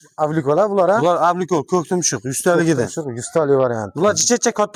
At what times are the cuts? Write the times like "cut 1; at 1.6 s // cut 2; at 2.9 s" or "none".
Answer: none